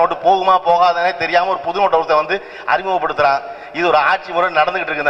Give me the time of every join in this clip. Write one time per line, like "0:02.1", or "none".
none